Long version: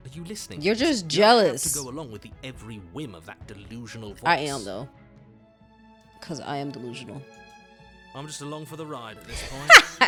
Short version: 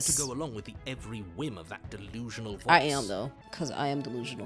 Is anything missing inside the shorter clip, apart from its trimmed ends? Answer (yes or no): yes